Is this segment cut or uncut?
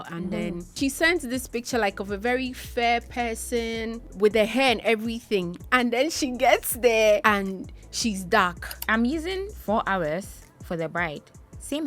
cut